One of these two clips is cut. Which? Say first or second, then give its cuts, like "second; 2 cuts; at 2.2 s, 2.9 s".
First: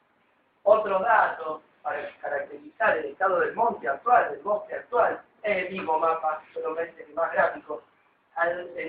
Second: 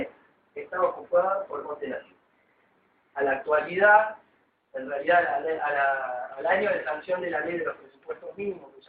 second; 1 cut; at 3.5 s